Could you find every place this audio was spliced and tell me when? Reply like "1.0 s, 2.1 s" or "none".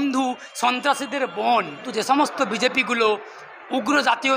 1.8 s